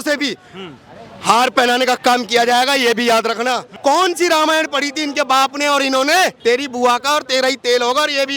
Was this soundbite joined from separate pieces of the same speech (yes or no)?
yes